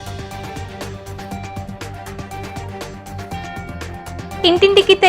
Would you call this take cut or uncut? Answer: cut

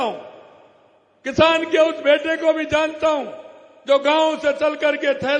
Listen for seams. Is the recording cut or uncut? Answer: uncut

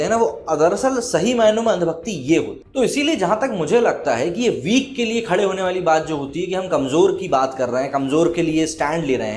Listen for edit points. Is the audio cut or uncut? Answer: uncut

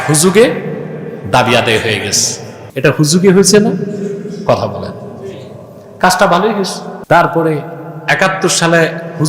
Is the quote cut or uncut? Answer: cut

